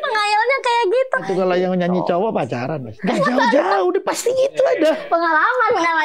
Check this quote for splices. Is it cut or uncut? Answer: cut